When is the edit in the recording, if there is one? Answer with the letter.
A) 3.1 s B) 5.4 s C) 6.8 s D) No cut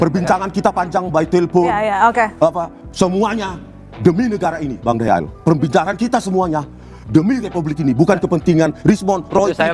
D